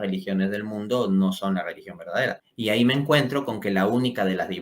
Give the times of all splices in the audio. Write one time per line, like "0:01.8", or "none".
0:02.5